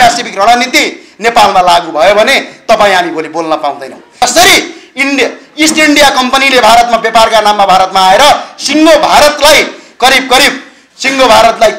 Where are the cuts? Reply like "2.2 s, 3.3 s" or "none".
4.0 s